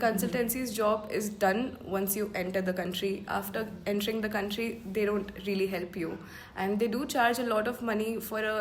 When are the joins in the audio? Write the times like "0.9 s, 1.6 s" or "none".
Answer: none